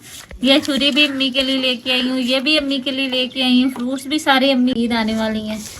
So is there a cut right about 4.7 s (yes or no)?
yes